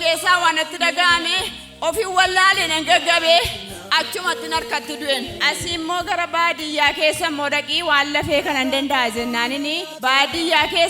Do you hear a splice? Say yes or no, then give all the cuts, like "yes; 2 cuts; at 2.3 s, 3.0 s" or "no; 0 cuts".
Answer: yes; 2 cuts; at 5.3 s, 9.9 s